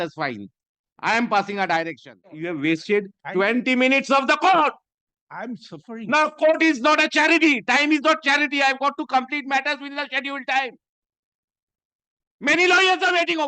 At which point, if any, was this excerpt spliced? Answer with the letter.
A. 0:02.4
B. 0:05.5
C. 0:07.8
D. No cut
A